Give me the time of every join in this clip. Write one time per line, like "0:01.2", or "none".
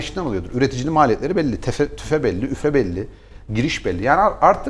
none